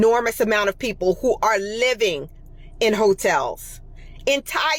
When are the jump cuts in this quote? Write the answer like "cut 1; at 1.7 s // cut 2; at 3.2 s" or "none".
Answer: none